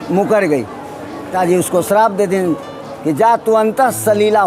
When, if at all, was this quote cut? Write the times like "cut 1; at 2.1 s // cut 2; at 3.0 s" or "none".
cut 1; at 1.3 s